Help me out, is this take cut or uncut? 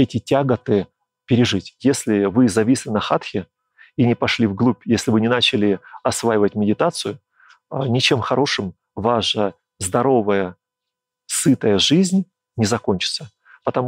cut